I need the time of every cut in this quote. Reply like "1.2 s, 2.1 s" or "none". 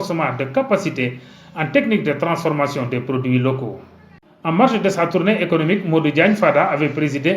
4.0 s